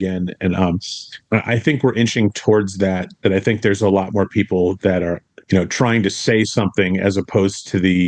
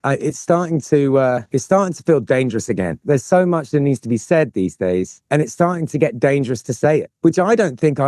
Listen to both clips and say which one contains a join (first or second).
second